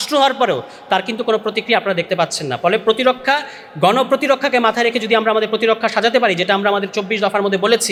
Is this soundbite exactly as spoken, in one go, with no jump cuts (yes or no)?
yes